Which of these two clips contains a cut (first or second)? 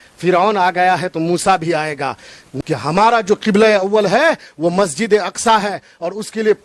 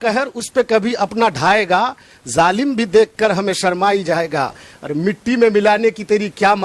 first